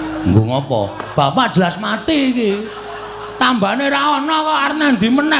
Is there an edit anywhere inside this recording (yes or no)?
no